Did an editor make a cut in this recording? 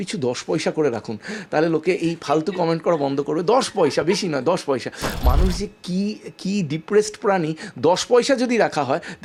no; 0 cuts

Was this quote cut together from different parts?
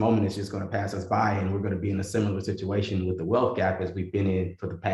no; 0 cuts

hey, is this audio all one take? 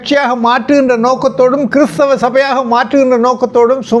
yes; 0 cuts

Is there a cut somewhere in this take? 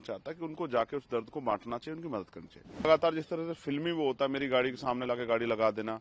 yes; 1 cut; at 2.9 s

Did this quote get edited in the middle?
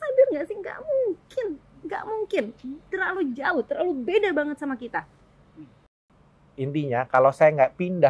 yes; 1 cut; at 6.0 s

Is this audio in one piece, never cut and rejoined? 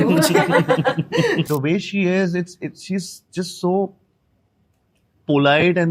no; 1 cut; at 1.4 s

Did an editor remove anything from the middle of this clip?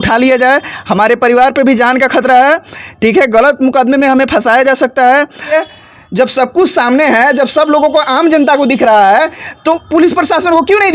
yes; 1 cut; at 5.5 s

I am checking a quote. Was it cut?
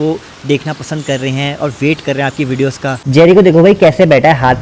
yes; 1 cut; at 3.0 s

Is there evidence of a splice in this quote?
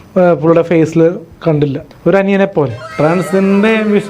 yes; 2 cuts; at 1.9 s, 2.8 s

